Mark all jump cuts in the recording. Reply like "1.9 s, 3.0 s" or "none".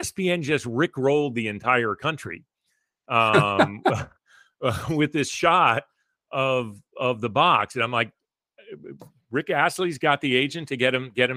none